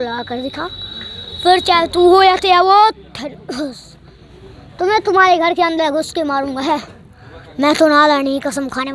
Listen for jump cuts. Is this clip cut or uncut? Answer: uncut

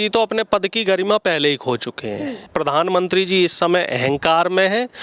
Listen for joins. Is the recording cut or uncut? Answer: cut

